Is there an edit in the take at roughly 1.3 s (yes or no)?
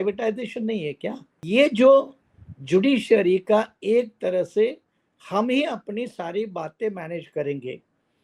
yes